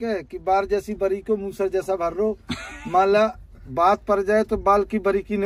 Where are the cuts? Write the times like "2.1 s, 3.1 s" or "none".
none